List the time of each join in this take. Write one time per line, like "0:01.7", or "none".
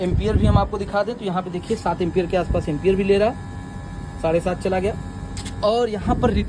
none